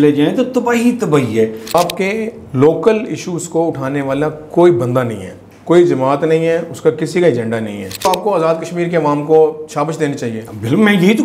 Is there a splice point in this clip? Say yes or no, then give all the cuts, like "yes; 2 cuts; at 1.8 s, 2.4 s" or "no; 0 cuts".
yes; 2 cuts; at 1.8 s, 8.0 s